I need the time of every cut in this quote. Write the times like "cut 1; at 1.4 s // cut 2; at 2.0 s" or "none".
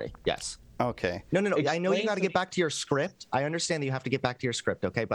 cut 1; at 1.2 s

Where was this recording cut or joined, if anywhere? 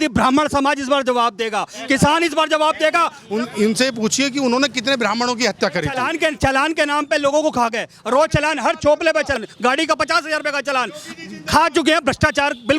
cut 1; at 3.2 s // cut 2; at 5.9 s // cut 3; at 9.4 s

